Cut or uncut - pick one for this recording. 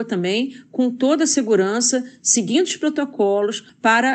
uncut